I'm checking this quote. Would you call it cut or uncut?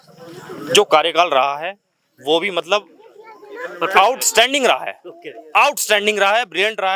uncut